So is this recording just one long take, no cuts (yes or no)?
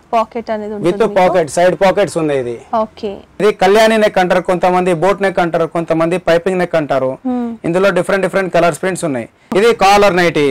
no